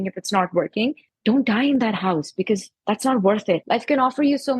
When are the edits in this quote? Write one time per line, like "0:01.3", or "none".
0:01.1
0:03.6